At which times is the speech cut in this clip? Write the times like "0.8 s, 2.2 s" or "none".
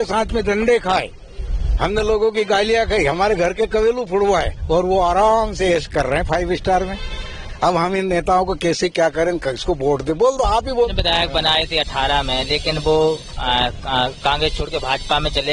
10.9 s